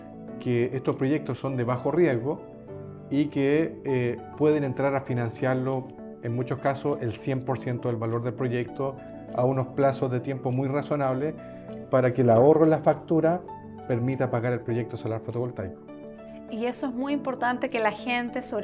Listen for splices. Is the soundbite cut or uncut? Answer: uncut